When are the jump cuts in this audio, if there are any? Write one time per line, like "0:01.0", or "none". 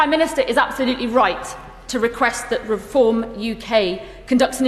none